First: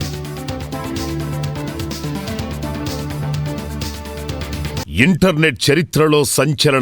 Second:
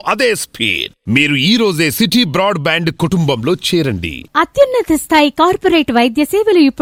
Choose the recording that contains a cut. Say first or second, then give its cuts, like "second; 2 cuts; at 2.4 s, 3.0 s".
first; 1 cut; at 4.8 s